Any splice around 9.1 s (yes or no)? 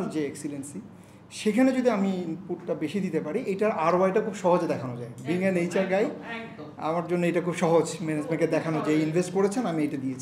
no